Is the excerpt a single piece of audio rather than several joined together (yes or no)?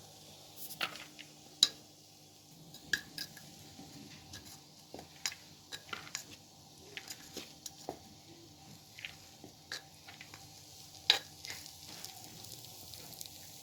yes